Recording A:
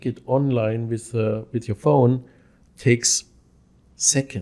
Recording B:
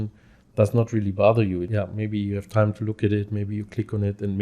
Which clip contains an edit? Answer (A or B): B